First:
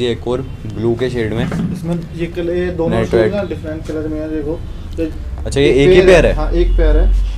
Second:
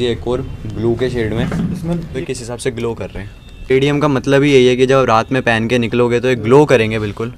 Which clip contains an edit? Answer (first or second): second